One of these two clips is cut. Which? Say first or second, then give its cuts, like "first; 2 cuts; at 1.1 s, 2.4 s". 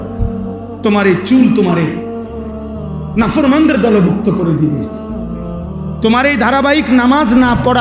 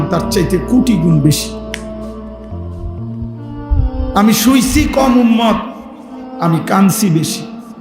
second; 2 cuts; at 1.4 s, 3.1 s